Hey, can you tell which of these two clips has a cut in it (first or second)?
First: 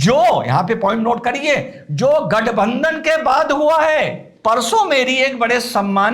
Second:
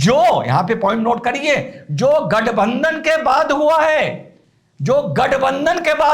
first